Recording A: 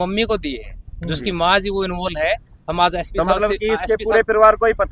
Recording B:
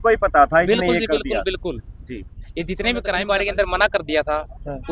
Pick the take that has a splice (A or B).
B